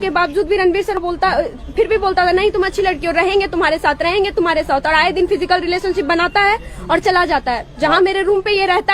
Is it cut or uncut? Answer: cut